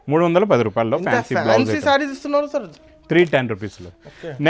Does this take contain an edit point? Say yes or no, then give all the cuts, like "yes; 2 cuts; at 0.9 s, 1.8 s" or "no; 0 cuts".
no; 0 cuts